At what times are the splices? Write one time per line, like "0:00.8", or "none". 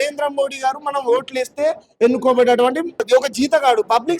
0:03.0